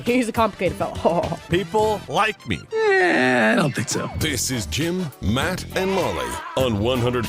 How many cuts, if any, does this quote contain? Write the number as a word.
two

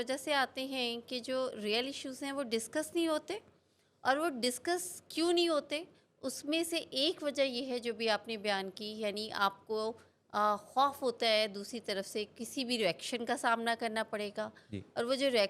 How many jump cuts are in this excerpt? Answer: zero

